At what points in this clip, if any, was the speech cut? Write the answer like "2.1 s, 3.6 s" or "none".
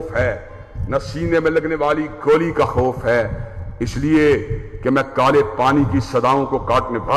none